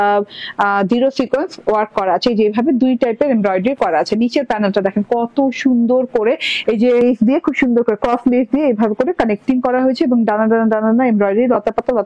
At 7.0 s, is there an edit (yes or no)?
yes